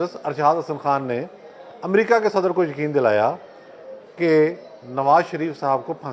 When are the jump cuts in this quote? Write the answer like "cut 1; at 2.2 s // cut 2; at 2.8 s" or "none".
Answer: none